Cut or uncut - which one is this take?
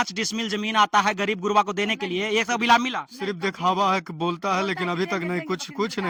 uncut